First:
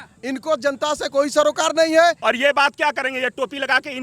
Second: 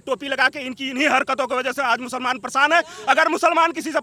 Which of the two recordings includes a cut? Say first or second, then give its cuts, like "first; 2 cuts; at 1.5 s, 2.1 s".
first; 1 cut; at 2.2 s